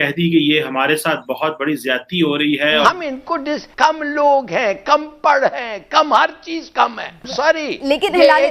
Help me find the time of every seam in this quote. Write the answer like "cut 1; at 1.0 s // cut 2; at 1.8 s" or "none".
cut 1; at 2.8 s // cut 2; at 7.2 s